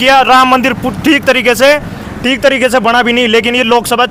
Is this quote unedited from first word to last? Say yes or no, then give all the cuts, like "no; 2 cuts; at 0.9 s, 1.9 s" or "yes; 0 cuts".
yes; 0 cuts